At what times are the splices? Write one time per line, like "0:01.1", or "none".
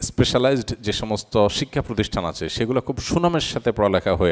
none